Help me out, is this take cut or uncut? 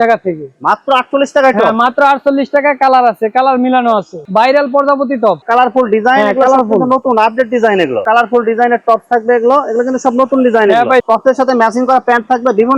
cut